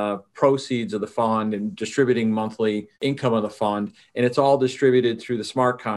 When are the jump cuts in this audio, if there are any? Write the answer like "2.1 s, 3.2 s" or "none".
3.0 s

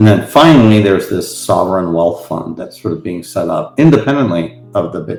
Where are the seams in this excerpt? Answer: none

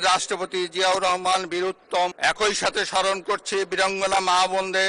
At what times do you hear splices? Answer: 2.2 s

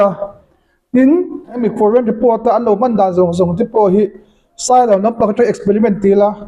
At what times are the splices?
1.6 s

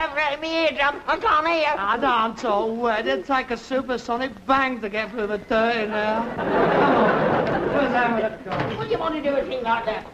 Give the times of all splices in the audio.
none

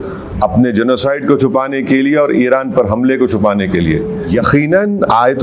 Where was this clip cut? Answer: 4.3 s

